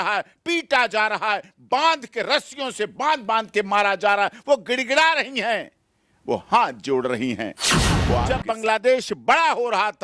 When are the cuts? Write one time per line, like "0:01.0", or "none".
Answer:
0:08.0